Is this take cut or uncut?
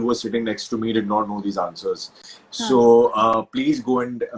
uncut